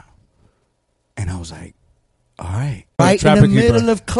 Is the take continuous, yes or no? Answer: no